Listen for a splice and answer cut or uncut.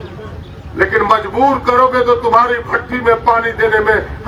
uncut